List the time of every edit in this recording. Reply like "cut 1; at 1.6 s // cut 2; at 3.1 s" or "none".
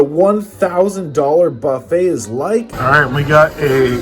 cut 1; at 2.7 s